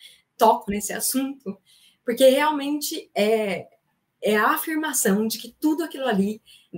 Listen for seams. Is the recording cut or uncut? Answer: uncut